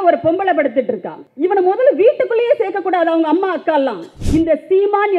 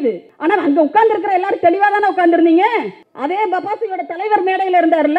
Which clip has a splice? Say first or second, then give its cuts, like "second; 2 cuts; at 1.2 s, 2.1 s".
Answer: first; 1 cut; at 4.1 s